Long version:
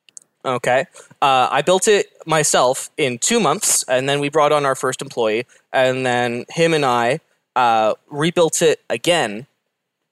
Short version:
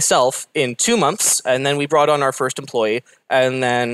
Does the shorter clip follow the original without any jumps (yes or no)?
yes